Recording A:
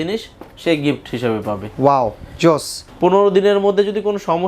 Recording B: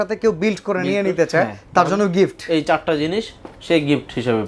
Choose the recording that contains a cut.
A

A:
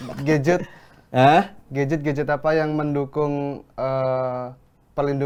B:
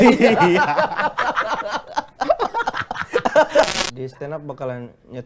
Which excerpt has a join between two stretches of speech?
B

